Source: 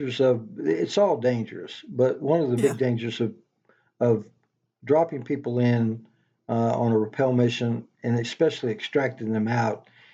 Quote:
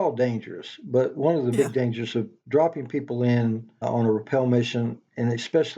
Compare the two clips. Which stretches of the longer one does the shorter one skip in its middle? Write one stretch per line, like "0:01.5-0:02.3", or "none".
0:03.4-0:04.7
0:06.2-0:06.7